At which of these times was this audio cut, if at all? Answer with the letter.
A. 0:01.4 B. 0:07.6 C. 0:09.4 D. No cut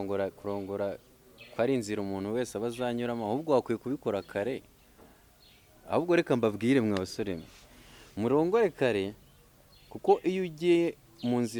D